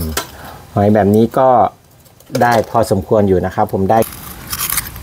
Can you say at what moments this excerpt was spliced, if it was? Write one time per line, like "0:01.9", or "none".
0:04.1

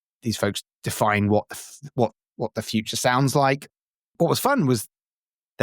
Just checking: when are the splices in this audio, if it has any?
0:04.1

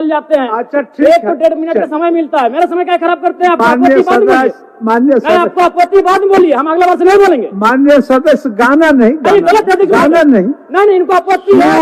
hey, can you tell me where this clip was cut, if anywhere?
0:03.5

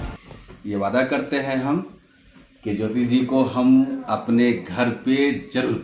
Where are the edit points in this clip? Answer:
none

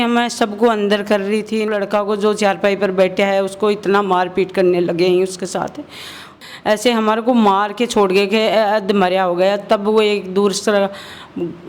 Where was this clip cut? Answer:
0:01.7
0:06.4

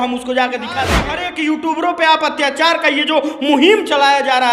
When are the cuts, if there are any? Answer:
0:01.1

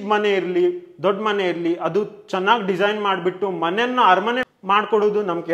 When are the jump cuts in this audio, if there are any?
0:04.5

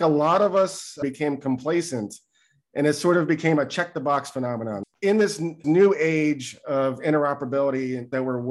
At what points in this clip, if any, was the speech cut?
0:01.0
0:04.9

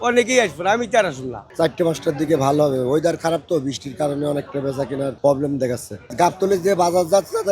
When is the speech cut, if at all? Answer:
0:01.5
0:06.0

